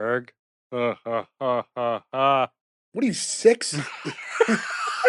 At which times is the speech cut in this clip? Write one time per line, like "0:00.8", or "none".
none